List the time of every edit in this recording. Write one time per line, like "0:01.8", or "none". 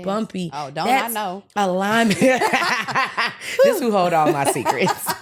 none